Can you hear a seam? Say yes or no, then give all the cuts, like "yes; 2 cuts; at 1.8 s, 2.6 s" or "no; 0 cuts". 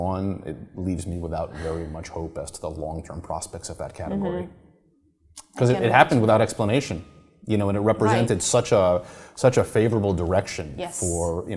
no; 0 cuts